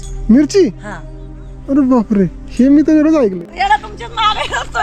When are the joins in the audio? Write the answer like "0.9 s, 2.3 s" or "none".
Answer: 3.4 s